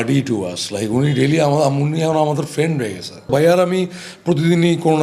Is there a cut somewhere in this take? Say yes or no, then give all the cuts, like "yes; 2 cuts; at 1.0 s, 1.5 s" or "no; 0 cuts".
yes; 1 cut; at 3.3 s